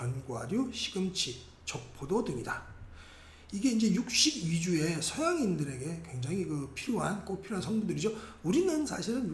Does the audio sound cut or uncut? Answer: uncut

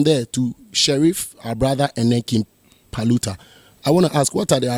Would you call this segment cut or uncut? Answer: uncut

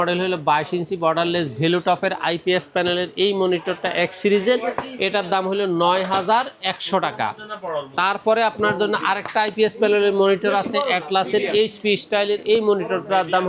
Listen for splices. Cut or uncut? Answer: uncut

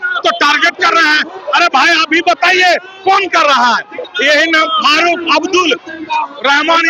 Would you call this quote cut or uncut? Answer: uncut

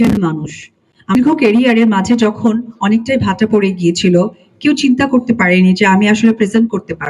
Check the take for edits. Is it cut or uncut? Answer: cut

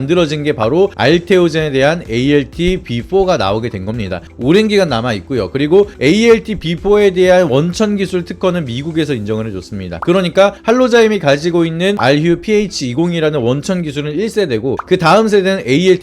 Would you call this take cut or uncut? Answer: uncut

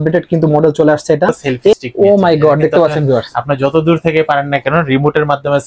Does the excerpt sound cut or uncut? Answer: cut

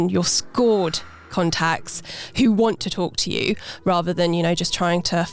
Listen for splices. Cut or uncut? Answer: uncut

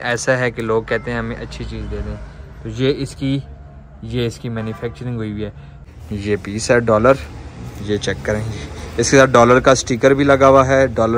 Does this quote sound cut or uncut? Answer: cut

